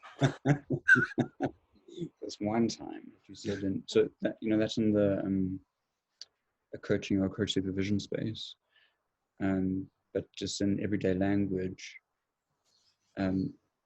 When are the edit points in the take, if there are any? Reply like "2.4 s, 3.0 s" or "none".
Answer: 3.5 s